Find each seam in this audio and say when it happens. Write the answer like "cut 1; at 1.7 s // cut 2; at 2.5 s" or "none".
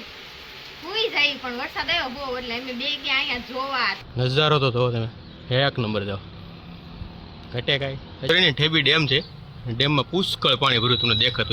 cut 1; at 4.0 s // cut 2; at 8.3 s